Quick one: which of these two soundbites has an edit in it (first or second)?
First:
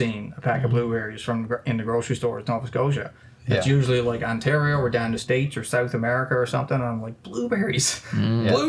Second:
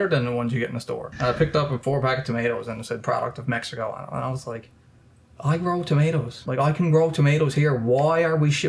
second